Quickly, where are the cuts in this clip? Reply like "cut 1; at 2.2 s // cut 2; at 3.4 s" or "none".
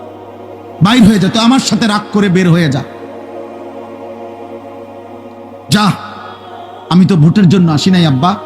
cut 1; at 3.5 s // cut 2; at 5.1 s